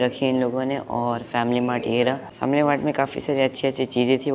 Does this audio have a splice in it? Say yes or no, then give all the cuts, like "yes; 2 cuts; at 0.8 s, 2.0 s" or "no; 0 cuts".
no; 0 cuts